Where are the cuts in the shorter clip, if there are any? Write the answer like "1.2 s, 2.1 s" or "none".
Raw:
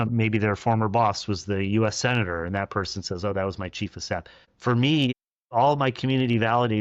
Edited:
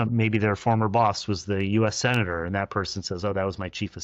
none